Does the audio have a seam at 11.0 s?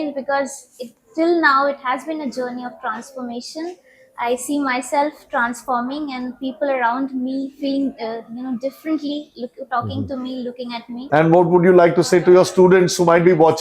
yes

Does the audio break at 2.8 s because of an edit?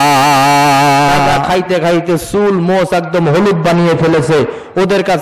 no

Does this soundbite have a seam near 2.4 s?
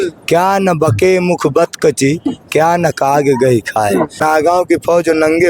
no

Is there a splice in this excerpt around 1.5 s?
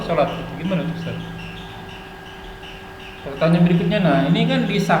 yes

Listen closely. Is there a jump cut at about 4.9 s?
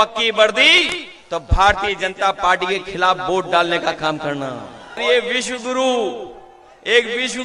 yes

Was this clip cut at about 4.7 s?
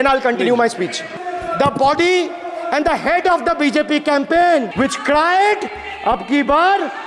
yes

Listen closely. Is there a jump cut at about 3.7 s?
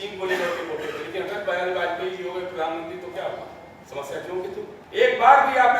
yes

